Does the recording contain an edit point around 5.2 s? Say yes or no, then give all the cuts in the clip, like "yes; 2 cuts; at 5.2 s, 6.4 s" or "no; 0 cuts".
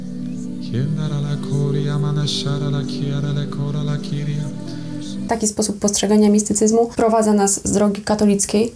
yes; 2 cuts; at 5.2 s, 6.9 s